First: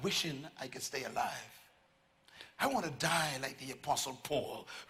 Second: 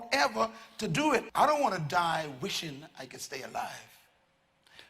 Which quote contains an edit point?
second; 1 cut; at 1.3 s

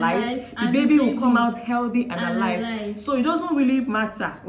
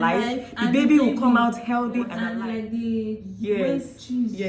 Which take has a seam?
second; 1 cut; at 2.2 s

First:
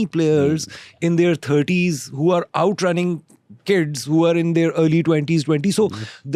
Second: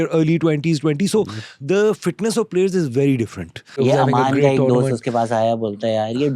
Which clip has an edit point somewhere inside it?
second; 1 cut; at 3.6 s

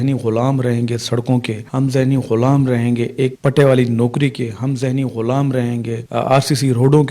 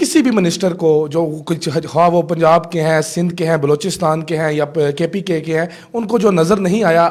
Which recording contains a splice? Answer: first; 2 cuts; at 1.6 s, 6.0 s

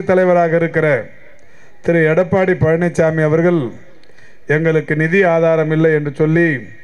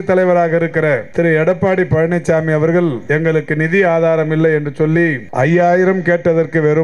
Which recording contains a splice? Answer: second; 3 cuts; at 1.1 s, 3.0 s, 5.2 s

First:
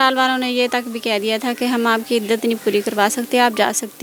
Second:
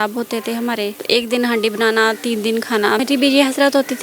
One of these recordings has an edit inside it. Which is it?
second; 2 cuts; at 1.0 s, 3.0 s

